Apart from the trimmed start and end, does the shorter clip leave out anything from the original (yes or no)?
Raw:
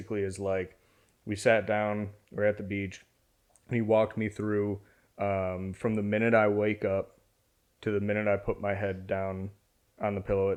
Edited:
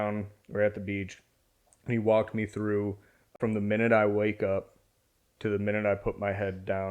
yes